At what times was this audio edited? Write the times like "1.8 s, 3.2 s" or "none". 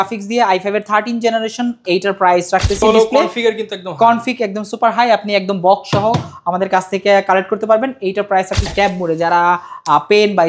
2.8 s, 8.7 s